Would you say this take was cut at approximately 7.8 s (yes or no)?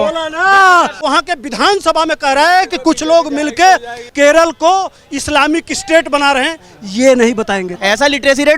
yes